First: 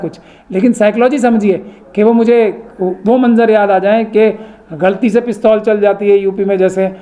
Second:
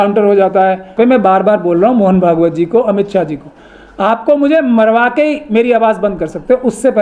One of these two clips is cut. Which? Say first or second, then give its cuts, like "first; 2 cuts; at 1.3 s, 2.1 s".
second; 1 cut; at 0.9 s